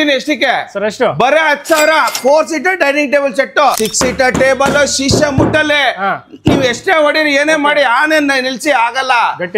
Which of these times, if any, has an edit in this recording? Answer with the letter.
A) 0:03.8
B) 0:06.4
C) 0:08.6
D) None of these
A